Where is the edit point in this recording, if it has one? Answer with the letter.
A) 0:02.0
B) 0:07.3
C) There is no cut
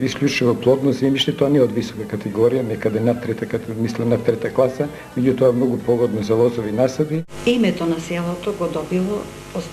B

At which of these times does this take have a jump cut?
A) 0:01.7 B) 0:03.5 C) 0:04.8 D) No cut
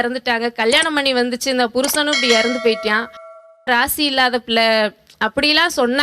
B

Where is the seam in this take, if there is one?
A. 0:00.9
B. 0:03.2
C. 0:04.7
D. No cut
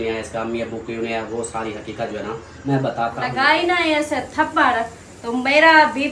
B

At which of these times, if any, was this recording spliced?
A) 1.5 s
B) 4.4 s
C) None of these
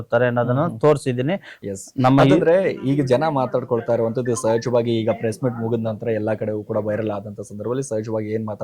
A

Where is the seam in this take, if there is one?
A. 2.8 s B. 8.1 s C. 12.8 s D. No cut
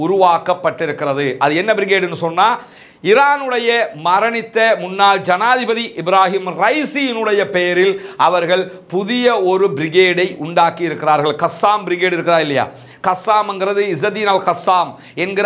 D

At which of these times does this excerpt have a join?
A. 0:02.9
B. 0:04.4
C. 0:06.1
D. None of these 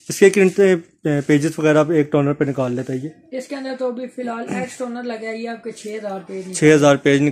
D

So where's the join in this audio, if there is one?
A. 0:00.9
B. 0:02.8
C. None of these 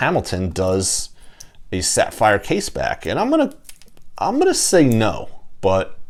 C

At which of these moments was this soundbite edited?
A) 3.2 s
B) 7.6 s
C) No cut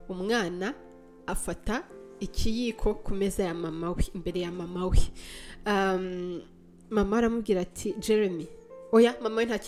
C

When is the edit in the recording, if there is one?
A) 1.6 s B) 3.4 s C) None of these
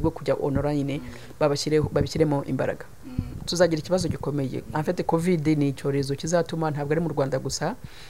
B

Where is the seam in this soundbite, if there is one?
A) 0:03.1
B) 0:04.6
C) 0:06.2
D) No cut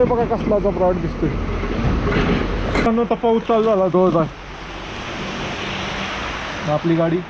A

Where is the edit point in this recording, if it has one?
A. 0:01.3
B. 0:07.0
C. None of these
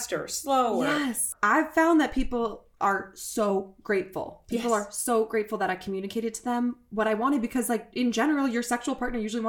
A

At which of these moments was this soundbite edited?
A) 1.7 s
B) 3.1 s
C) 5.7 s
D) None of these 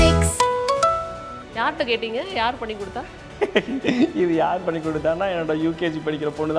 A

